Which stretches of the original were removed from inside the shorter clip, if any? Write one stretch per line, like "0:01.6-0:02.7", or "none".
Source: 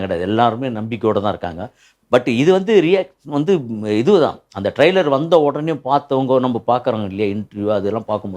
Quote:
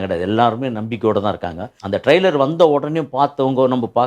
0:01.8-0:04.5